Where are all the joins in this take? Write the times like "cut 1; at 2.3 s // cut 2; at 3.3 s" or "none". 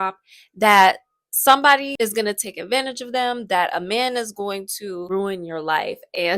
cut 1; at 1.9 s // cut 2; at 5.1 s

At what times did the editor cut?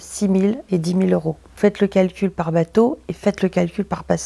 none

